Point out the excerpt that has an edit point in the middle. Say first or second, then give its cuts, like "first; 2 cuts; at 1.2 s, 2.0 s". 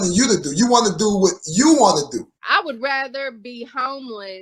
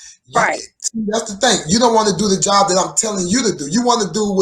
first; 1 cut; at 2.4 s